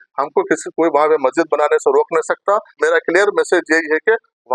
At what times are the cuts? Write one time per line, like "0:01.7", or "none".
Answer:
0:02.7